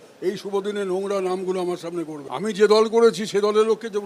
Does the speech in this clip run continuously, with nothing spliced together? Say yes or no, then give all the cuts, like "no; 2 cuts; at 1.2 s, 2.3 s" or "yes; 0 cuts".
no; 1 cut; at 2.2 s